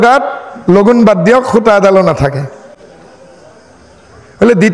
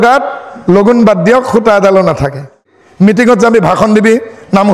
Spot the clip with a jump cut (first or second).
second